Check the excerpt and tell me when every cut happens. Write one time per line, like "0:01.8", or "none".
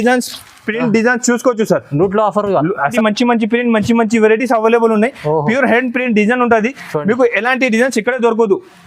0:02.9